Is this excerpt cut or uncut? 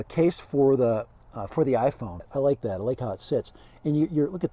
cut